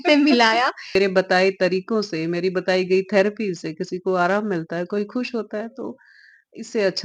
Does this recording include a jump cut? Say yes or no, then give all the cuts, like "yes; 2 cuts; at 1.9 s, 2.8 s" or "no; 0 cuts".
yes; 1 cut; at 1.0 s